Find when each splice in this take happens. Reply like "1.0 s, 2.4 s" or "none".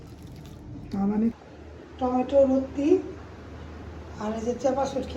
1.3 s